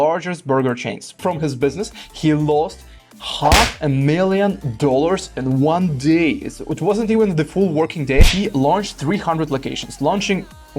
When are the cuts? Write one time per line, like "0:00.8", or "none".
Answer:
0:01.2
0:08.3